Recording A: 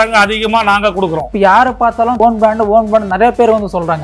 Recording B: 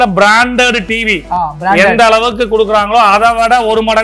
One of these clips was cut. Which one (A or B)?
A